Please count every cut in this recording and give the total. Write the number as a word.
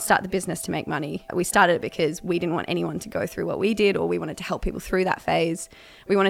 one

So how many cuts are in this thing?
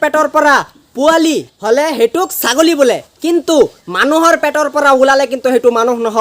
one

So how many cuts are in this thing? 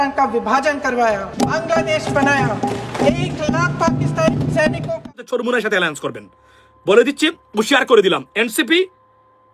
one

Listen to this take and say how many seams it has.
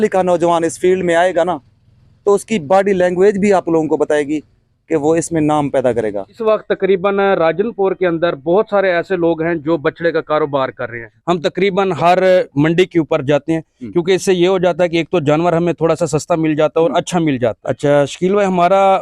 three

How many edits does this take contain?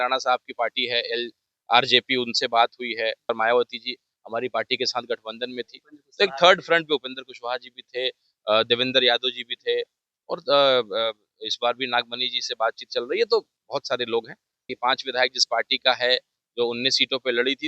two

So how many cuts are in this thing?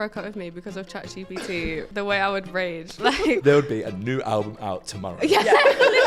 two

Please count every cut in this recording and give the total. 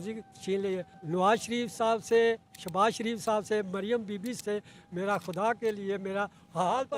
two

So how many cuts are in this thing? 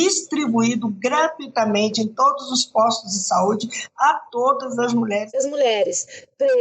one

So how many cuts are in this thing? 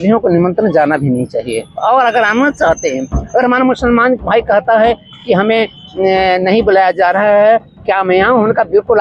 zero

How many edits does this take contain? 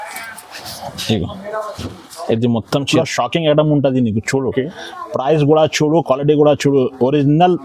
one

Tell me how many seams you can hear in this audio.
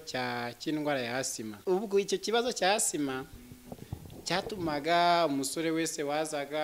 one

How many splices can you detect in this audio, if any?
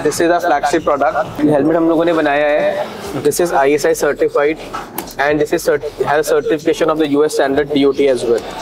one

